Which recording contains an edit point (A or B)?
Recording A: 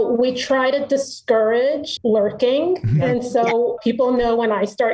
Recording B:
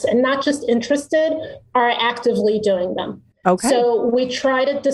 A